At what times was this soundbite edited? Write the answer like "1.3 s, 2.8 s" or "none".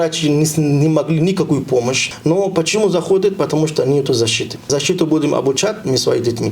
2.1 s, 4.5 s